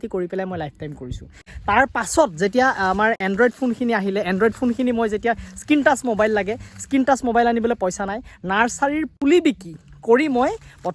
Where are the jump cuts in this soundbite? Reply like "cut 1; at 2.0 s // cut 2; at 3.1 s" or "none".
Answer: cut 1; at 1.4 s